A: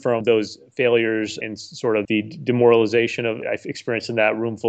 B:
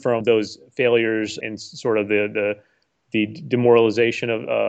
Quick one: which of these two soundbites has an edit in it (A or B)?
A